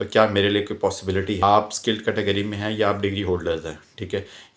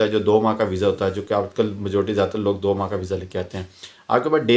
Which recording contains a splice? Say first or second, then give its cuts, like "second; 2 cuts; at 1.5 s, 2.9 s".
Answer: first; 1 cut; at 1.4 s